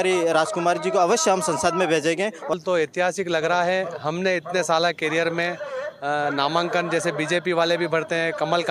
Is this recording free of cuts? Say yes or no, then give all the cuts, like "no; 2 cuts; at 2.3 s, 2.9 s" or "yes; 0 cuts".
no; 1 cut; at 2.5 s